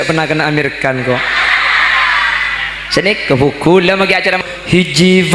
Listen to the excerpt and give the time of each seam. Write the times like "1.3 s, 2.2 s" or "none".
4.4 s